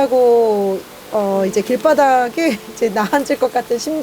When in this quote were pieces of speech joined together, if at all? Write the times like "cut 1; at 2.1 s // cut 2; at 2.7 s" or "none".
none

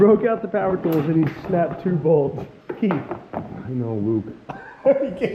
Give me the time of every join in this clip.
none

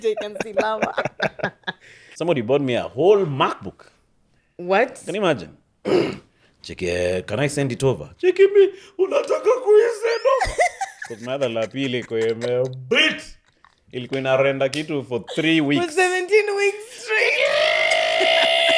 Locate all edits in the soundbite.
cut 1; at 2.1 s

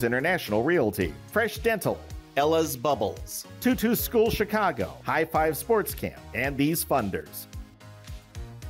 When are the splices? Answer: cut 1; at 7.3 s

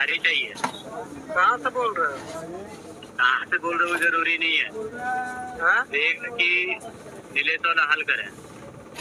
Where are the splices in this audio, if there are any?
none

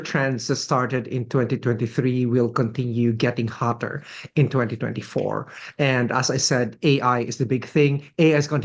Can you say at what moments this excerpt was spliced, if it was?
none

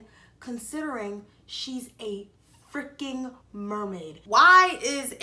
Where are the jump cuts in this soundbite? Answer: cut 1; at 4.2 s

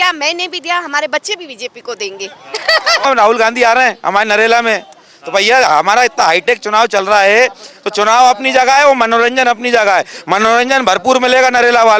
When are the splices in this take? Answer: cut 1; at 3.0 s

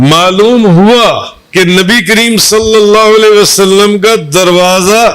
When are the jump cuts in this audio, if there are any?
cut 1; at 1.3 s

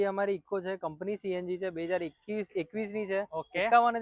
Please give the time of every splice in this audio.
none

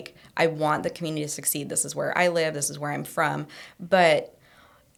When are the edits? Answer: none

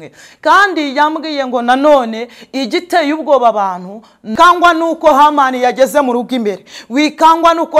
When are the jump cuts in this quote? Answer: cut 1; at 4.3 s

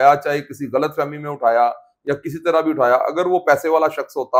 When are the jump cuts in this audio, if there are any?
none

